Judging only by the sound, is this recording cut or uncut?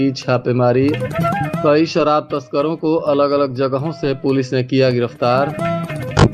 uncut